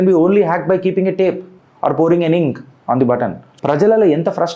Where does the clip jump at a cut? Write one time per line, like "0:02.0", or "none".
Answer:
0:03.5